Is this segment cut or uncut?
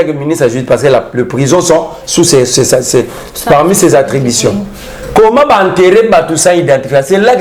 uncut